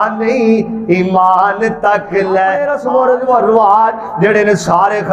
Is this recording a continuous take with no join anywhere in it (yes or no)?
no